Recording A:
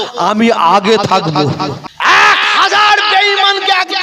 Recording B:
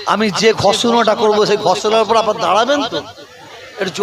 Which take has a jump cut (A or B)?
A